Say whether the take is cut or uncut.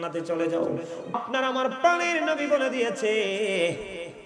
cut